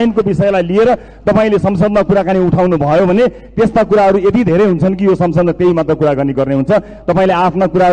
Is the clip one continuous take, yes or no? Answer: yes